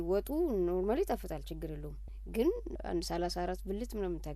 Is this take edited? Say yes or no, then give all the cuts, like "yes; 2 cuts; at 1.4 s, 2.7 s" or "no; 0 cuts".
no; 0 cuts